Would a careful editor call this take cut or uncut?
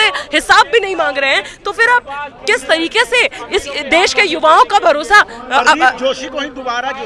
uncut